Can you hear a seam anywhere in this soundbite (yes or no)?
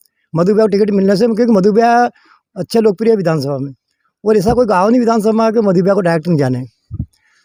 no